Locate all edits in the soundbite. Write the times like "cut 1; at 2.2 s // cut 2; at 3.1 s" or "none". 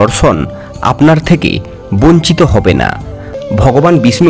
cut 1; at 3.3 s